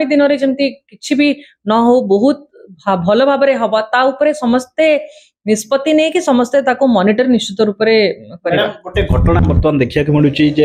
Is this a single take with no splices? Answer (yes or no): yes